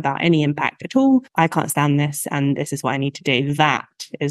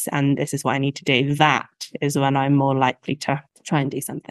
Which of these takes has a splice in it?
first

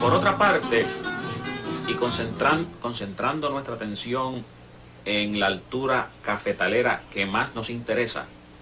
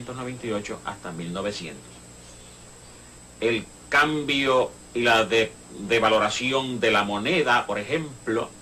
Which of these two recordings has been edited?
second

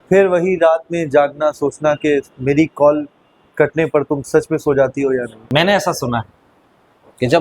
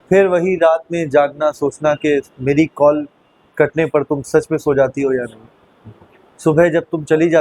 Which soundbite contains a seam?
first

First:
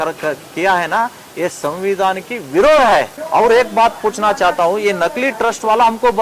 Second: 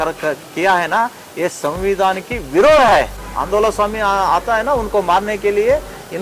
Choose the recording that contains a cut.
second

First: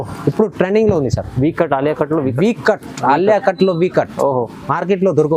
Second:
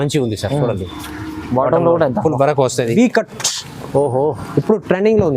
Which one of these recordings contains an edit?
second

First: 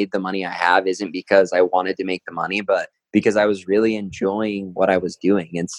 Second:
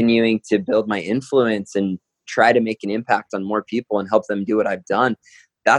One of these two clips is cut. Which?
first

